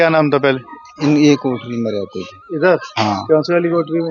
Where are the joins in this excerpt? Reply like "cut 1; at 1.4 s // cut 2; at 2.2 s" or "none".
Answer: none